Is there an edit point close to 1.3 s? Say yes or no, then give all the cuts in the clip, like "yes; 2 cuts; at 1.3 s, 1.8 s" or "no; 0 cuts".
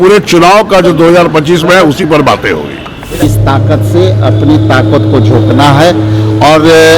no; 1 cut; at 3.2 s